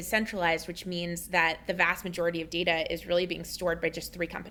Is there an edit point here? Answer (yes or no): no